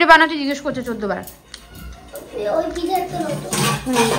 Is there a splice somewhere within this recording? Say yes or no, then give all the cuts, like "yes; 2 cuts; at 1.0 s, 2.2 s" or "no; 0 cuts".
no; 0 cuts